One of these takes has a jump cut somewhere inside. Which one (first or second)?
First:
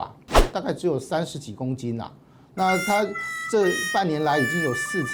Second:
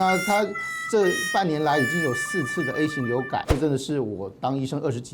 second